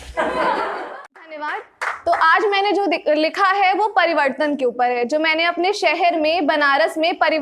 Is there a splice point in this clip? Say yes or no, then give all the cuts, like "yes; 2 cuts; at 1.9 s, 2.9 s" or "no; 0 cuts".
yes; 1 cut; at 1.6 s